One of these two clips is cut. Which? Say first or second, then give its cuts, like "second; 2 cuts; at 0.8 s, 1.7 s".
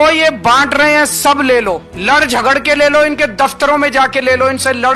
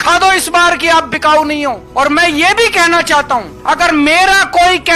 first; 1 cut; at 1.9 s